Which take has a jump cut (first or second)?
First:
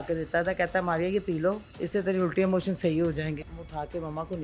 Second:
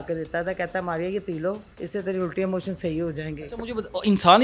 first